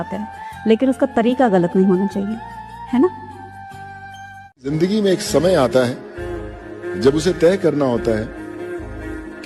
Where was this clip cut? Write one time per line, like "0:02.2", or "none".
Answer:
0:04.5